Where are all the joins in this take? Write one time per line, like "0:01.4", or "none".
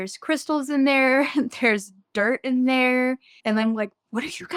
none